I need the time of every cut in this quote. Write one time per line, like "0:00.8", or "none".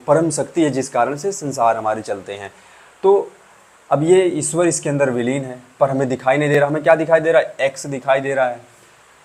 none